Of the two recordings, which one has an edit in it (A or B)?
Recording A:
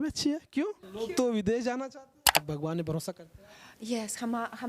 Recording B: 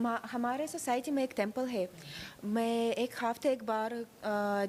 A